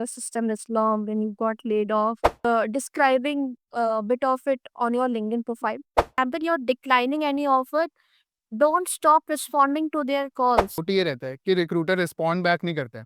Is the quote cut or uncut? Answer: cut